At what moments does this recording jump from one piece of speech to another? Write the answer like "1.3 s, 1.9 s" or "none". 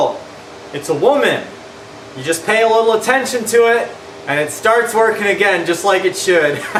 none